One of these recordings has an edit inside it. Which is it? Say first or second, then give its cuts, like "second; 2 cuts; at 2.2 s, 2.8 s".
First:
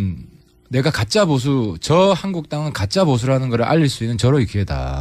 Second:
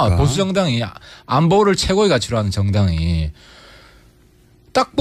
second; 1 cut; at 1.7 s